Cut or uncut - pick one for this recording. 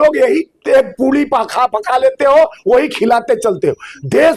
uncut